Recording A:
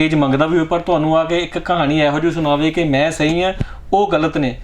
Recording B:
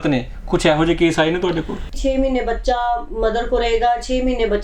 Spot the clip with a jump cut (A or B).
B